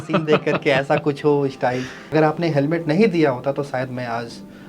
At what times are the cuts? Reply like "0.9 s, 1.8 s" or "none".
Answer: 2.0 s